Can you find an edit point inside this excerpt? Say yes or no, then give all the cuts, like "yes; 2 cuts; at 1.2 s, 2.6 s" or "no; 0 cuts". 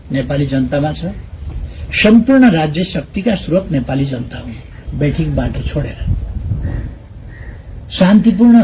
yes; 1 cut; at 4.8 s